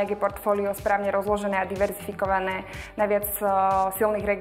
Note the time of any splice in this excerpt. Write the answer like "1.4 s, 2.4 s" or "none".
none